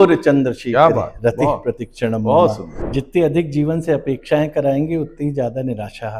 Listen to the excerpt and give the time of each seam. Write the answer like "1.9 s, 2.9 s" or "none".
2.7 s